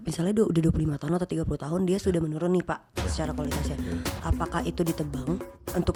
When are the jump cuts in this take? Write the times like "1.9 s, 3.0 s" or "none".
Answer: none